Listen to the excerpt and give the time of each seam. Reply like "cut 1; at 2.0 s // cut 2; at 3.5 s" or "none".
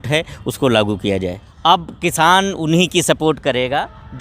cut 1; at 1.5 s